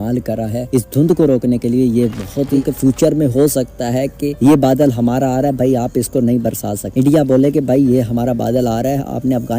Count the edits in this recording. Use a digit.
1